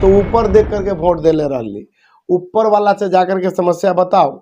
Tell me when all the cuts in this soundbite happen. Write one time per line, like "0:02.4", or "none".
none